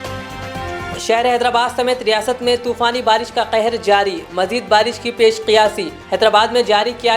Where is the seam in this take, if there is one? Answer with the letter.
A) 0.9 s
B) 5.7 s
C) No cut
A